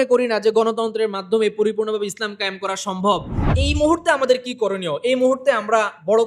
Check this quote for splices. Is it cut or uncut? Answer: cut